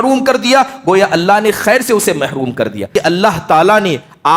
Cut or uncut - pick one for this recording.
cut